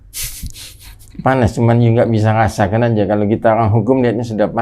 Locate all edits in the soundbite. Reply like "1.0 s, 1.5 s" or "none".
none